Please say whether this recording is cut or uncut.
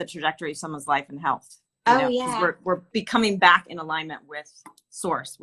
uncut